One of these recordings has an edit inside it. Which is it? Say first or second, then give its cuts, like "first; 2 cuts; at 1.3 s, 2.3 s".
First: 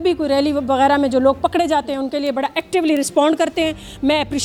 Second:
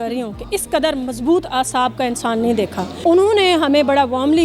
second; 1 cut; at 2.9 s